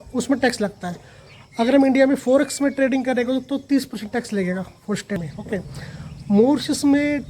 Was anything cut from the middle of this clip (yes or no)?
yes